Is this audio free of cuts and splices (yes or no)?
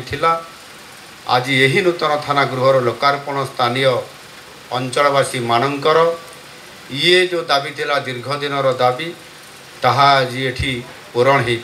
yes